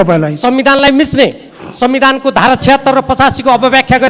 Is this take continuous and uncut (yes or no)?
yes